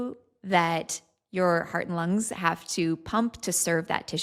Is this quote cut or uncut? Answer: uncut